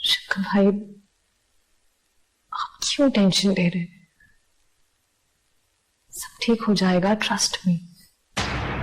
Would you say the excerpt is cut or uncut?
uncut